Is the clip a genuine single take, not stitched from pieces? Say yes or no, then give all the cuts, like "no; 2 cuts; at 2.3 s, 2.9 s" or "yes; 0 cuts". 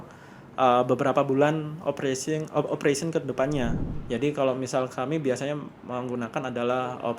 no; 1 cut; at 3.9 s